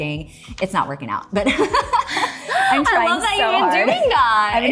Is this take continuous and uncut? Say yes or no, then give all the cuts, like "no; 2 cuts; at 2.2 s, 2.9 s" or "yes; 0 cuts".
yes; 0 cuts